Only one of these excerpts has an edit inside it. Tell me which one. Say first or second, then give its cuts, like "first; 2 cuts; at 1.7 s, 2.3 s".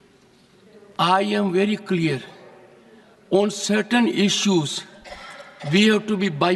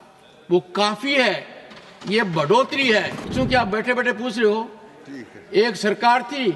second; 1 cut; at 3.3 s